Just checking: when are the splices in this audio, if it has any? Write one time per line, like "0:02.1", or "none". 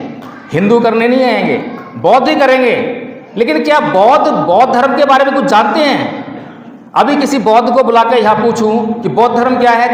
none